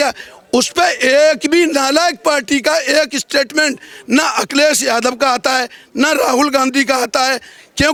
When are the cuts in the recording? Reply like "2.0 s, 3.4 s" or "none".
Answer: none

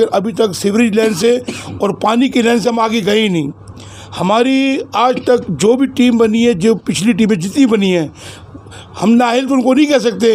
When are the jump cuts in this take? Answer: none

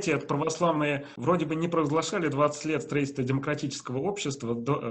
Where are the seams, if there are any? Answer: 1.1 s

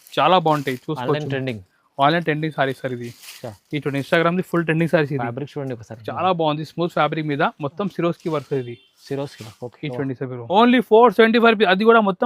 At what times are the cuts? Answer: 10.4 s

